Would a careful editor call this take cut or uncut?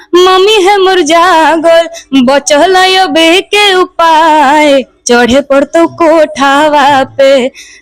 uncut